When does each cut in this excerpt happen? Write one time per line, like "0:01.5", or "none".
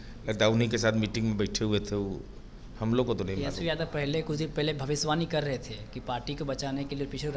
none